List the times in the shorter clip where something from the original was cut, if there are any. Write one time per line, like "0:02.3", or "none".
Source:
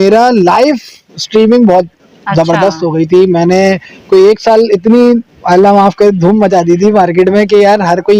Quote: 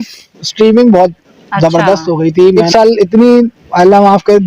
0:02.6